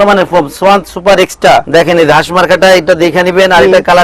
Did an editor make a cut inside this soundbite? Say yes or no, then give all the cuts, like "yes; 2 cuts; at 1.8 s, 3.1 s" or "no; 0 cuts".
yes; 1 cut; at 1.7 s